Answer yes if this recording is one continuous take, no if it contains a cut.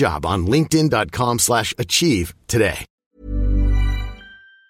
yes